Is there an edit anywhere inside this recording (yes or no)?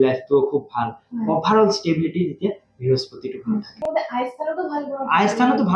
yes